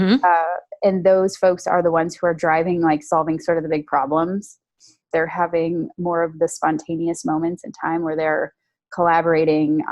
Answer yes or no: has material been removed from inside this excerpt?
yes